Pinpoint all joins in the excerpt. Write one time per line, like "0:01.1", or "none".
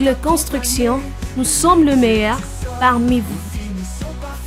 none